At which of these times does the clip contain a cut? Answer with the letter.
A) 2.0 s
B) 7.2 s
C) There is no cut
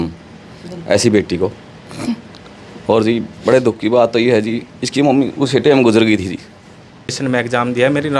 B